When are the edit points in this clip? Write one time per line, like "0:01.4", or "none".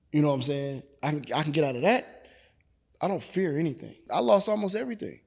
0:04.1